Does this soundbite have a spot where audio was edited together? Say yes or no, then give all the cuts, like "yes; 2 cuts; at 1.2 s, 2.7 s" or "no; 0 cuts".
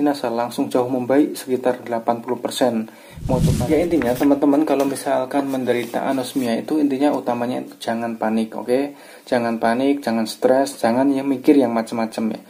yes; 1 cut; at 3.5 s